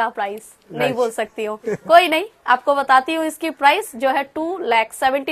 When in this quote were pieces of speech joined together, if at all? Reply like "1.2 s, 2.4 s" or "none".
none